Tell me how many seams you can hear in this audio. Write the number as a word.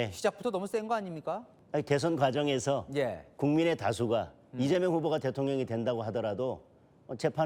one